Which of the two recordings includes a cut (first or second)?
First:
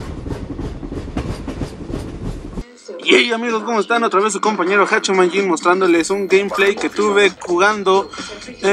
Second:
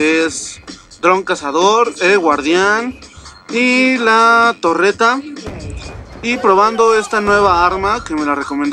second